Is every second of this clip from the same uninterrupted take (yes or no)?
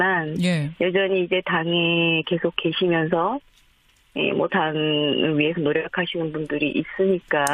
no